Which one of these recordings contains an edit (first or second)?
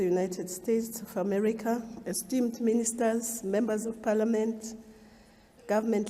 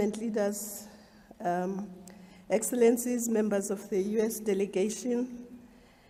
first